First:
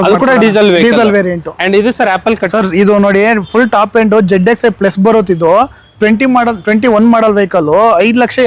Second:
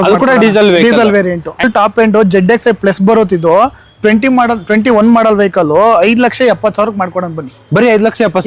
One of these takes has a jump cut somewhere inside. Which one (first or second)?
second